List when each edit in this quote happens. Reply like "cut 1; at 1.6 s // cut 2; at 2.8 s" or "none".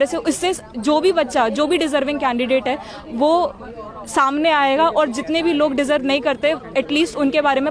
none